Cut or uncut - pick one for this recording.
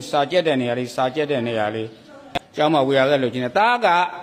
uncut